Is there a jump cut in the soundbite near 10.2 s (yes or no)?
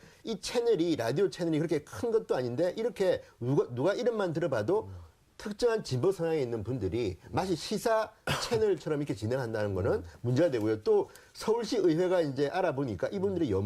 no